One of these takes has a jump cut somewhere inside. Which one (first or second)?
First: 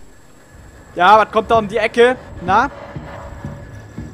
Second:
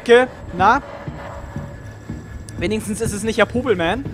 first